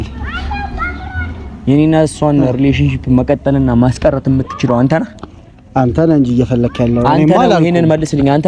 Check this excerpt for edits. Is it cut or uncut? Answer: uncut